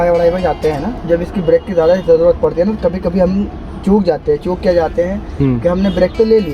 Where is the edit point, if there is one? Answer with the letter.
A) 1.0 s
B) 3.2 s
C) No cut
A